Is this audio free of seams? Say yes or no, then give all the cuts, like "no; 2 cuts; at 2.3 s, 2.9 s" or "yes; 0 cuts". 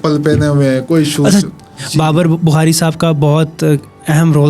no; 1 cut; at 1.8 s